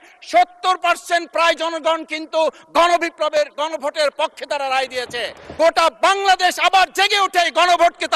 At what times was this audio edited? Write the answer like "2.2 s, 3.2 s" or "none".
5.4 s